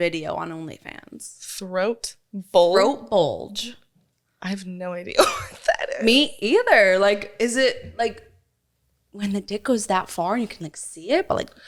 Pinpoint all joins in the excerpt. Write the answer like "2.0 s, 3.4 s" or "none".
none